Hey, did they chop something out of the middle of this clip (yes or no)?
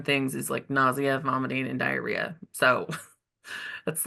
no